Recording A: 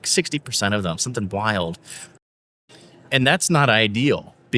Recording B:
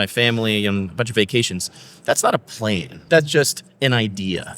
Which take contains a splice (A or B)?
B